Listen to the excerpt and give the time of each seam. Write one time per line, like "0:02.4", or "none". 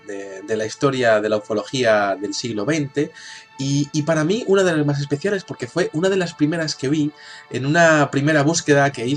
0:07.5